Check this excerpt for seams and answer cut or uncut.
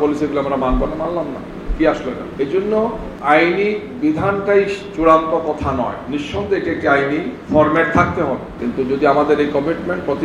cut